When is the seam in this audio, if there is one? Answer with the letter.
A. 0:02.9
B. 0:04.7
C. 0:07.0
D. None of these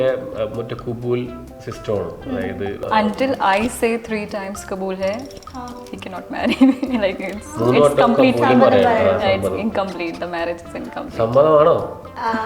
A